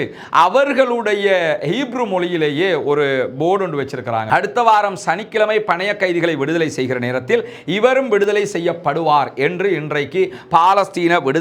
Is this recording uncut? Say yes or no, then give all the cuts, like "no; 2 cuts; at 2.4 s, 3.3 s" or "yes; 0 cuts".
no; 1 cut; at 4.3 s